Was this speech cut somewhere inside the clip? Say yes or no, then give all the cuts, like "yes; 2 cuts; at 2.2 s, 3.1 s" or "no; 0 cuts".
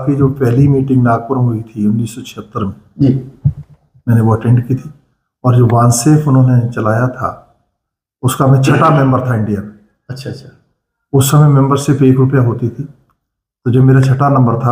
no; 0 cuts